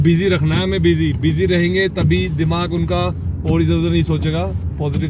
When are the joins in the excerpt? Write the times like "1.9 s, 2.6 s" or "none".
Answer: none